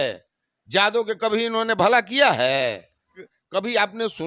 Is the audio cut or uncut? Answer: cut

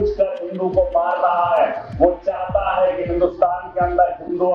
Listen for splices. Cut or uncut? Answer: uncut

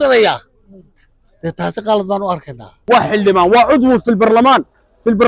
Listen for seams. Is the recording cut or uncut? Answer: cut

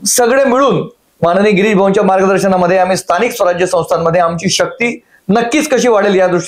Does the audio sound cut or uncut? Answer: uncut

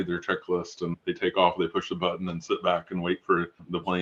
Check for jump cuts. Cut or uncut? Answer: uncut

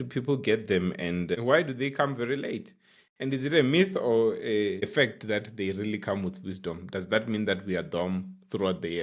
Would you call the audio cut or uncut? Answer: uncut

